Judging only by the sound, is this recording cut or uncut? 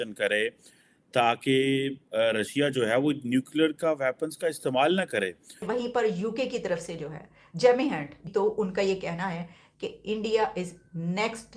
cut